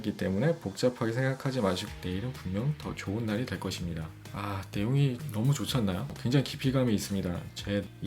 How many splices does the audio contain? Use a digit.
2